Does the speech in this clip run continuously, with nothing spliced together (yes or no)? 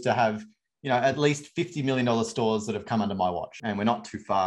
no